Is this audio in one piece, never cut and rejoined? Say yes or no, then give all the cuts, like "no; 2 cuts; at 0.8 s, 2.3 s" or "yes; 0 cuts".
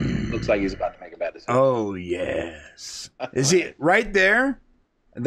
no; 1 cut; at 3.1 s